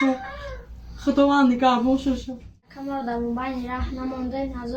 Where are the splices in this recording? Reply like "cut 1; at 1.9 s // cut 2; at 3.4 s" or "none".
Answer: cut 1; at 2.8 s